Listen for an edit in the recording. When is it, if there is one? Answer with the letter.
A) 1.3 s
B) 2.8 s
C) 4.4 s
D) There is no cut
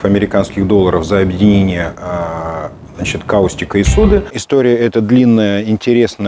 C